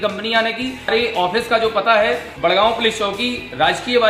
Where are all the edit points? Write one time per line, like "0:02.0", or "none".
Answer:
0:00.9
0:02.3